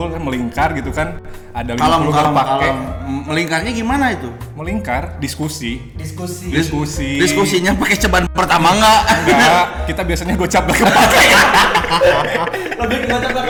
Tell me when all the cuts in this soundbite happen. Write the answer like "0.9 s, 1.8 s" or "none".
none